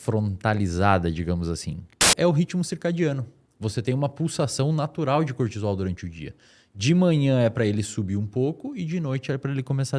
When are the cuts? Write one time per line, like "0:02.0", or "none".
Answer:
0:02.1